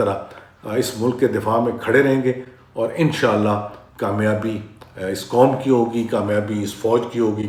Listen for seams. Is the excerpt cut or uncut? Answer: uncut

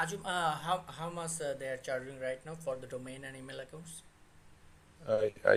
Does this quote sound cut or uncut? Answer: uncut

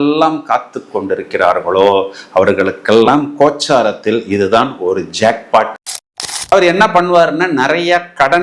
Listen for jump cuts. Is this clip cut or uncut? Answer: cut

